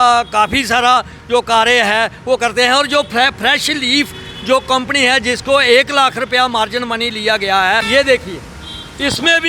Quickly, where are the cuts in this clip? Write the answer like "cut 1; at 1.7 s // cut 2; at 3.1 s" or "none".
cut 1; at 7.8 s